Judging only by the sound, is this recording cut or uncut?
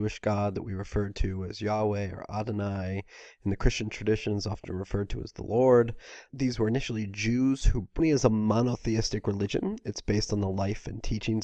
uncut